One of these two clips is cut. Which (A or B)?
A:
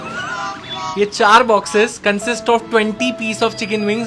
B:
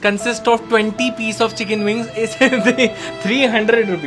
A